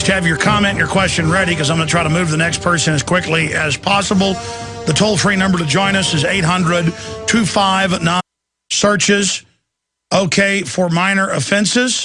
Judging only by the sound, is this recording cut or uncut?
uncut